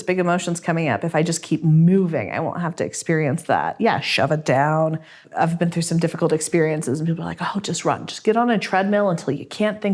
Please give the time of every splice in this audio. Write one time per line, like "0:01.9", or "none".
none